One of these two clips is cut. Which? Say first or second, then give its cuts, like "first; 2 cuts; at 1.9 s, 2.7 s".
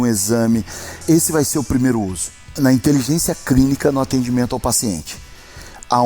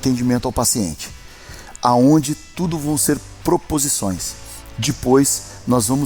first; 2 cuts; at 1.0 s, 2.5 s